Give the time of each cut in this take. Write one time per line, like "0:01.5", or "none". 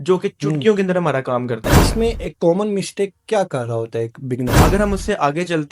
0:01.7
0:04.6